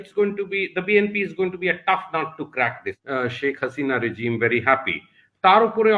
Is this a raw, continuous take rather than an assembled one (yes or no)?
no